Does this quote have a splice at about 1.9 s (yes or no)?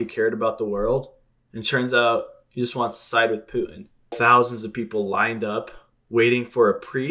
no